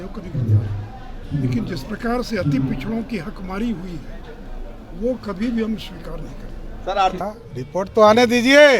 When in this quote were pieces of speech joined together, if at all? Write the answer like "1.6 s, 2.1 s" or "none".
7.2 s